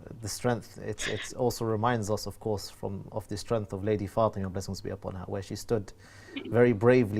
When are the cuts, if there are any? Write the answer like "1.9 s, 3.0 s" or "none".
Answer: none